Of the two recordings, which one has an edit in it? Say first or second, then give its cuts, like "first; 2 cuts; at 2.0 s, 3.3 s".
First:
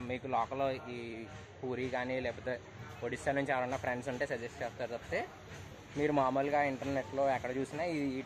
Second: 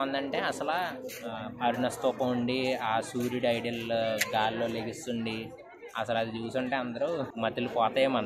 second; 1 cut; at 7.3 s